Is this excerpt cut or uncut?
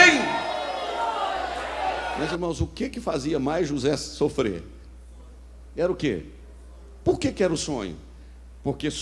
cut